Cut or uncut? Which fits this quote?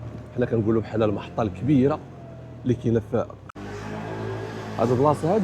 cut